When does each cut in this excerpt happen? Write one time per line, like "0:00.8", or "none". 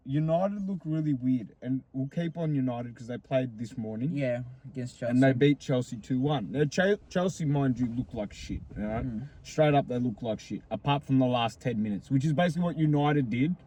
none